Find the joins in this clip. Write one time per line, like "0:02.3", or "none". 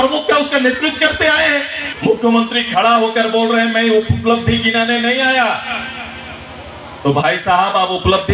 0:01.8

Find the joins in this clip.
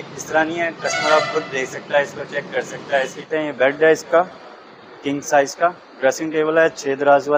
0:03.2

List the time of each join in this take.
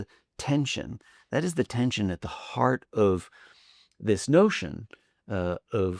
none

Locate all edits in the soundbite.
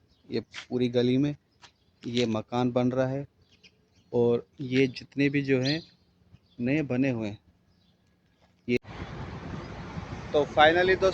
0:08.8

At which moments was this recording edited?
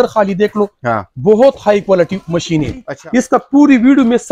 0:02.9

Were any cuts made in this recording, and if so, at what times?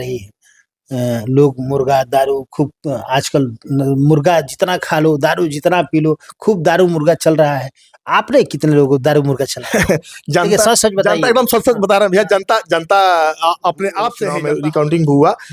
0:14.3

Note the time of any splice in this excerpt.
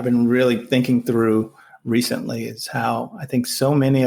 none

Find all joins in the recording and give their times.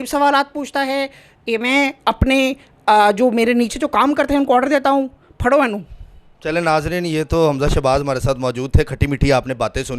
none

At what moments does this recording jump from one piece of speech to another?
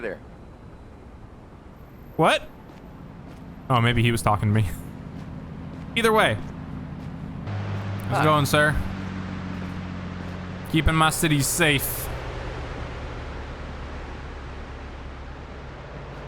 0:07.5

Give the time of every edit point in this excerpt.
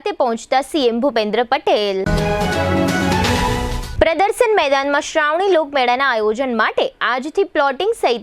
none

